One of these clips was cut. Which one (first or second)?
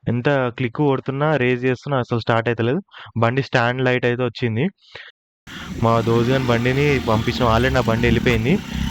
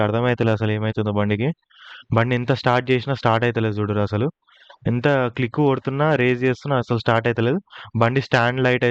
first